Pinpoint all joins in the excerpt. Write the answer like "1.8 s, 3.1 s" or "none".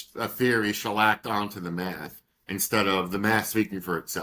none